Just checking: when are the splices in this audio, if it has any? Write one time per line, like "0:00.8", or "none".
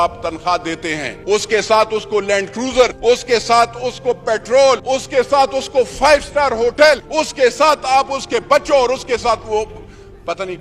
0:01.1
0:02.9
0:04.8
0:07.1